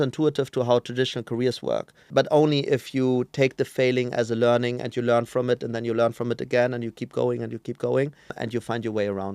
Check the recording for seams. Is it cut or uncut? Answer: cut